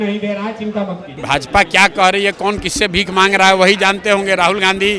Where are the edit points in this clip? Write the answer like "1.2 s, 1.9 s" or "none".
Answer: 1.2 s